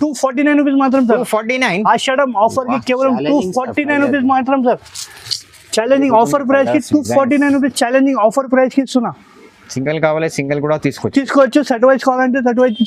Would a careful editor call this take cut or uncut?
uncut